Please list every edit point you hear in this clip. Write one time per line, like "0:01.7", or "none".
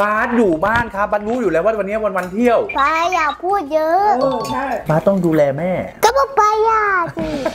none